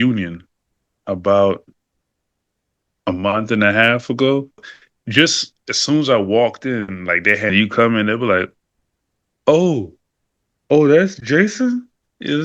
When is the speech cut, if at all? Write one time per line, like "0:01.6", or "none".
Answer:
0:04.7
0:07.5